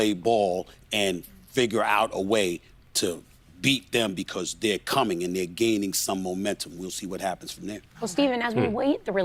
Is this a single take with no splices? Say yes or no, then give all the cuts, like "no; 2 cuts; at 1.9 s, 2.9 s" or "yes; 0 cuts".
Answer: yes; 0 cuts